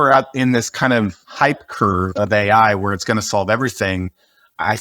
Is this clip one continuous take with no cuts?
no; 1 cut; at 1.2 s

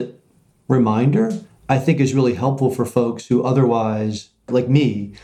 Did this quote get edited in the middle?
yes; 2 cuts; at 1.5 s, 4.5 s

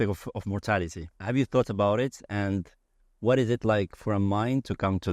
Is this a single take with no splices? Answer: no; 1 cut; at 1.1 s

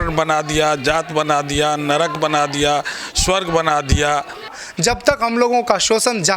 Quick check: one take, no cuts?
no; 1 cut; at 4.5 s

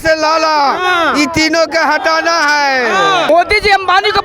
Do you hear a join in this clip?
yes; 1 cut; at 3.3 s

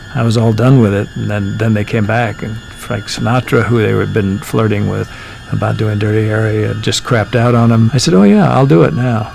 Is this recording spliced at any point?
yes; 3 cuts; at 5.1 s, 6.8 s, 7.9 s

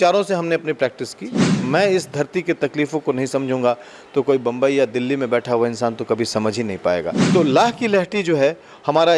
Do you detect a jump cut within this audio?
yes; 2 cuts; at 1.6 s, 7.2 s

